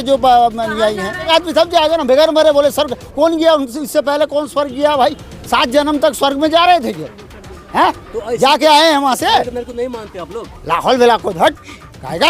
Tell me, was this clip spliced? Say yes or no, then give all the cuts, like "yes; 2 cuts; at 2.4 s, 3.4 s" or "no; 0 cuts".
yes; 1 cut; at 1.3 s